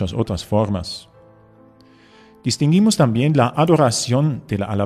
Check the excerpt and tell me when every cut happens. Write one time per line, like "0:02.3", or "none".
none